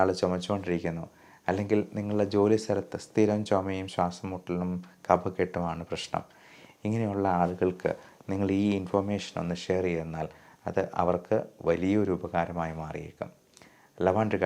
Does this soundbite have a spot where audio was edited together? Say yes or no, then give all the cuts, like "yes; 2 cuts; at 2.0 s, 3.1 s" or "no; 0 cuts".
no; 0 cuts